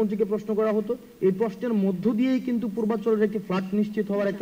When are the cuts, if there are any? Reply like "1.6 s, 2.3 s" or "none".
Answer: none